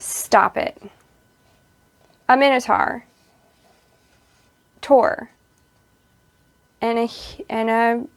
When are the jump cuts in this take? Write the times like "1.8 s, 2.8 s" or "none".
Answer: none